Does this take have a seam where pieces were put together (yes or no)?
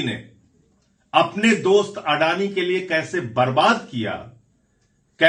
no